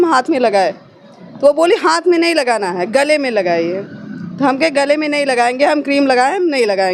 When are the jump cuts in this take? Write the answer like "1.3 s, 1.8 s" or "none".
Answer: none